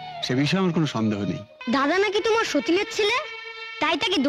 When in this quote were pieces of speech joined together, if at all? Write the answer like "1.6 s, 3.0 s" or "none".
1.5 s